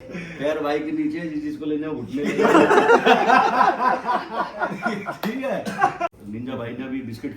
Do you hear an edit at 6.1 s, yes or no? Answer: yes